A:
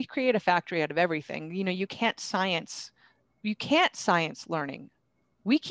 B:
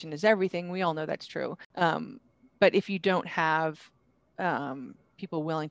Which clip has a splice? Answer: B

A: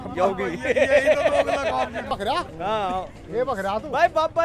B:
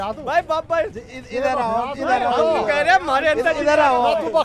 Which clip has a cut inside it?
A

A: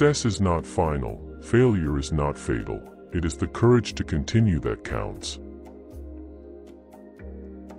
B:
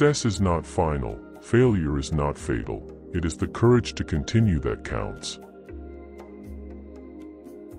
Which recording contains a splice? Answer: B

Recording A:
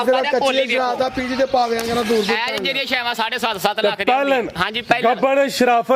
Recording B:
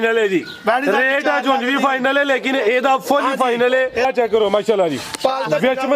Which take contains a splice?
B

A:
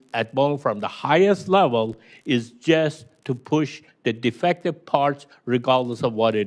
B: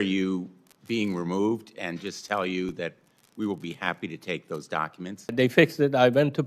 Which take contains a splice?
B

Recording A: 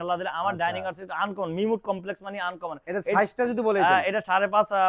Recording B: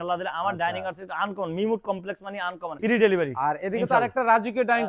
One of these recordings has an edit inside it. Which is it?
B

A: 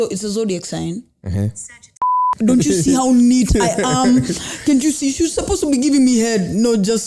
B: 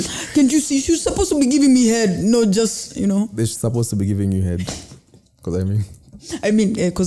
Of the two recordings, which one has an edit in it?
A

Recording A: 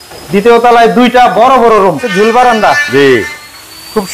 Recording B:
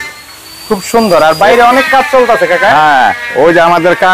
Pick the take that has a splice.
A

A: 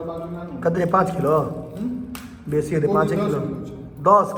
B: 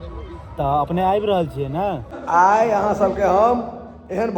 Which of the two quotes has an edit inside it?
B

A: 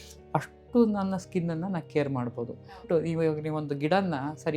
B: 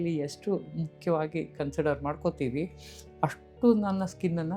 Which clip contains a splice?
A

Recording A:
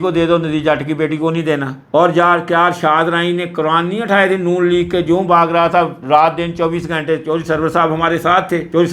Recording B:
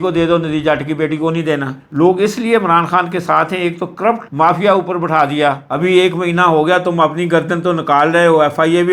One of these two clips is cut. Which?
B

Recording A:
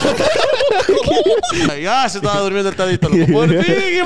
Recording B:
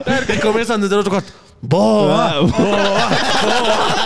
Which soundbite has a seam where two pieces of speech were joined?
A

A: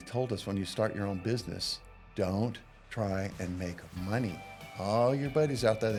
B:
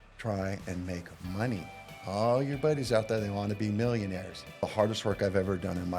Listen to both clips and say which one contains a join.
B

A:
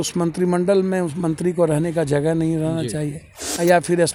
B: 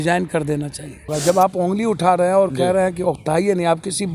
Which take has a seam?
B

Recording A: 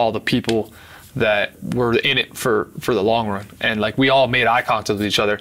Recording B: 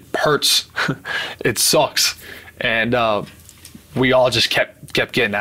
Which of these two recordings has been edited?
A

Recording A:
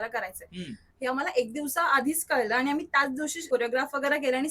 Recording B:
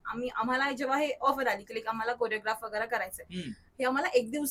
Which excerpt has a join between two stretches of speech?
A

